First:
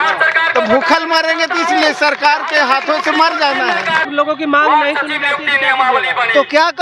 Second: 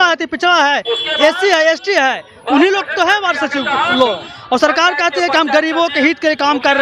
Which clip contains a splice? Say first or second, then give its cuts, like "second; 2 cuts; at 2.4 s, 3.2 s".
first; 1 cut; at 4.1 s